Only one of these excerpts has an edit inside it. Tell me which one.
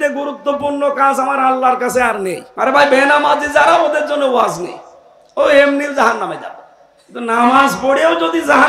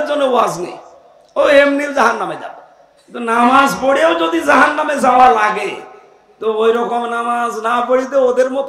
first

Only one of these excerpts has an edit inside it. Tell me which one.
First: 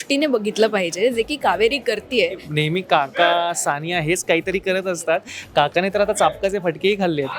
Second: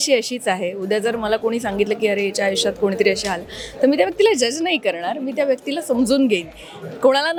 first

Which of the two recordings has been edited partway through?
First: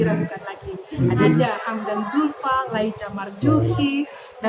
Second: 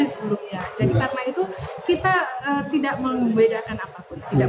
first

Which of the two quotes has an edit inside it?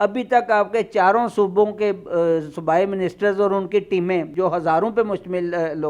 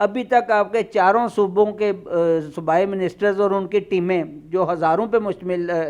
first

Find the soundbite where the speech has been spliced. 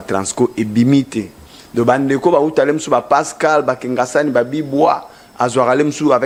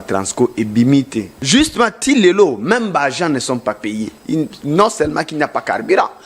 second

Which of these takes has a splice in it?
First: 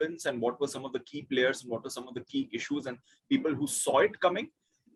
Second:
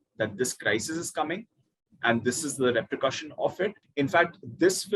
second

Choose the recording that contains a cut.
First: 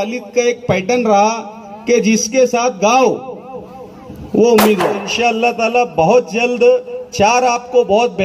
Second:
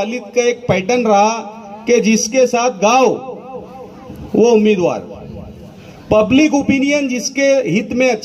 first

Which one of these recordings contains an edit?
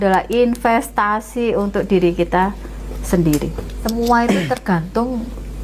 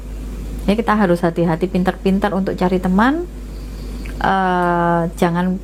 first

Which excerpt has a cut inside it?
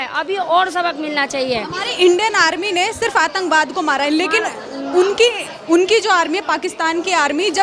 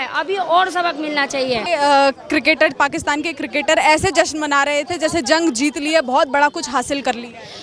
second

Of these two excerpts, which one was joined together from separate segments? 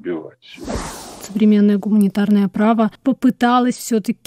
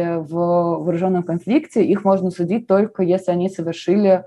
first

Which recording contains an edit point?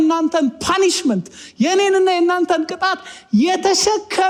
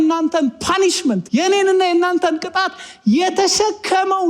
second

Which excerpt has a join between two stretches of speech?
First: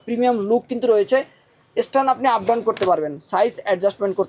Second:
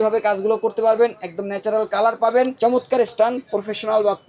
second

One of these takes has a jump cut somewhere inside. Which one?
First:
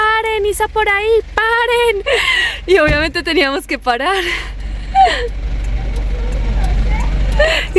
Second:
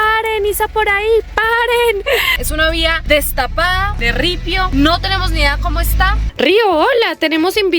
second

